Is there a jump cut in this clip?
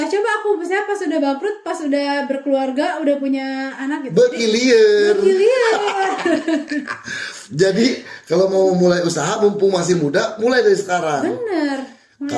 no; 0 cuts

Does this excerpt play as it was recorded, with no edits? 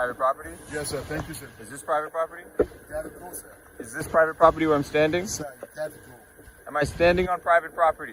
yes; 0 cuts

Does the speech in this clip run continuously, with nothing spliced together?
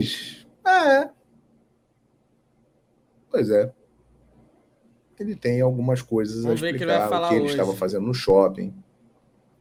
yes; 0 cuts

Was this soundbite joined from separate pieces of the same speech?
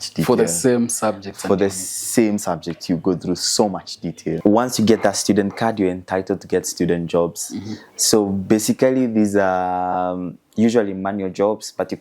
yes; 1 cut; at 4.4 s

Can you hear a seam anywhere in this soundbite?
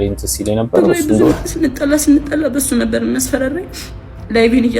yes; 1 cut; at 1.3 s

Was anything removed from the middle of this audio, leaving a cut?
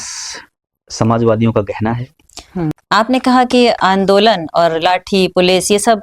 yes; 1 cut; at 2.8 s

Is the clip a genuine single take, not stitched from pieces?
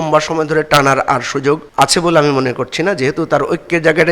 no; 1 cut; at 1.7 s

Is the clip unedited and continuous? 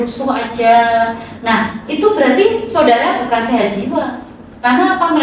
yes; 0 cuts

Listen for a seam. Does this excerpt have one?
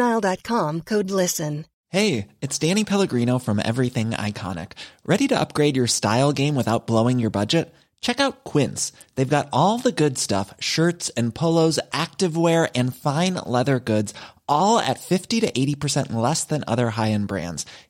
yes; 1 cut; at 1.7 s

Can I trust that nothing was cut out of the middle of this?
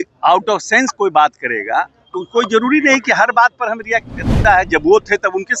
no; 1 cut; at 4.4 s

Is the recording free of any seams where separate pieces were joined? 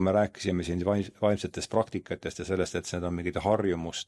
yes; 0 cuts

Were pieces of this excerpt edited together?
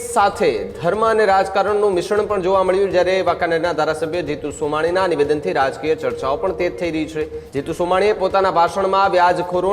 yes; 1 cut; at 7.4 s

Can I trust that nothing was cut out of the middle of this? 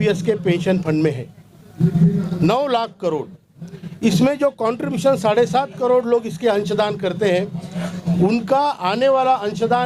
yes; 0 cuts

